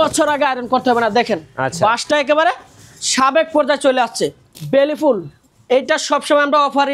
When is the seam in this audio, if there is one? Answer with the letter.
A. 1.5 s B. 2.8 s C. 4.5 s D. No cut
C